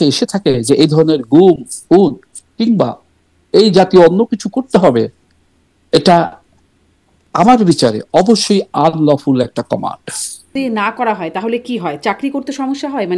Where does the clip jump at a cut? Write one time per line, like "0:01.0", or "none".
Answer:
0:10.5